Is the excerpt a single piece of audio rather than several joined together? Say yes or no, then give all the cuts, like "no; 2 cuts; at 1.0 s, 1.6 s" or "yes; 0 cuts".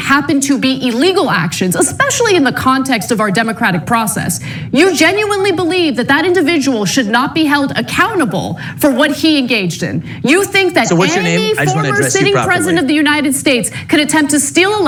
yes; 0 cuts